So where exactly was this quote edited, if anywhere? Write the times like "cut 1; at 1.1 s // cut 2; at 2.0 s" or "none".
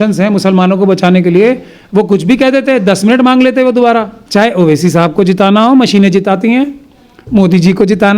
cut 1; at 4.2 s